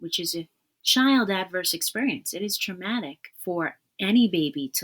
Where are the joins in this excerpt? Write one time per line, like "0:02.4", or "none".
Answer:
0:03.2

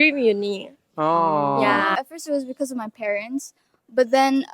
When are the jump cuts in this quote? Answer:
0:02.0

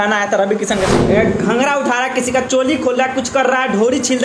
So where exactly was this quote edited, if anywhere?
0:01.0

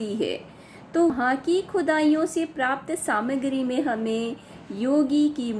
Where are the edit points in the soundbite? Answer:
0:01.1

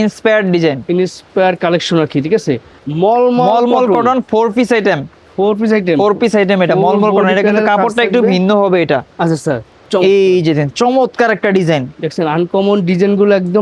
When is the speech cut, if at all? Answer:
0:02.8
0:09.7

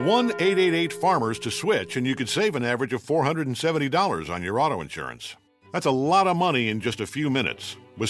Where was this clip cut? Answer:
0:01.3

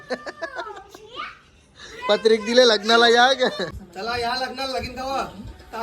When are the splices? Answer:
0:03.7

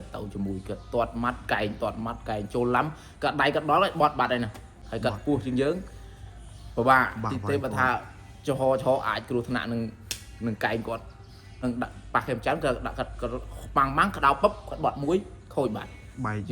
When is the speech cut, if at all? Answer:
0:04.7
0:11.6

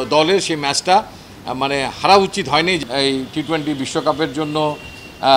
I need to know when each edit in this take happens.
0:02.8

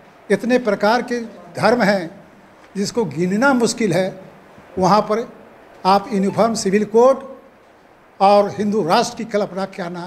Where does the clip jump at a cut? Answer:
none

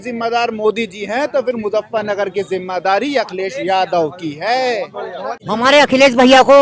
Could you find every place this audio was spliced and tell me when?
0:05.3

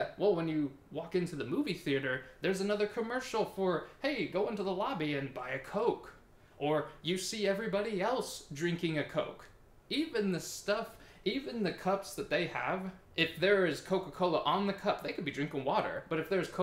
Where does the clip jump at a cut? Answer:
0:13.0

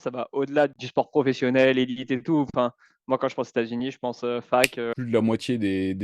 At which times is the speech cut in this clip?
0:00.8
0:05.0

